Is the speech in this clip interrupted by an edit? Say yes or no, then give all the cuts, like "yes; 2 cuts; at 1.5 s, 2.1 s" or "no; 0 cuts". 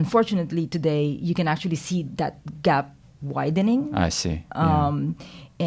no; 0 cuts